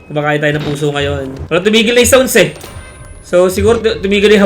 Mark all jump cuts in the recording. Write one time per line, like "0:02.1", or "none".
0:01.4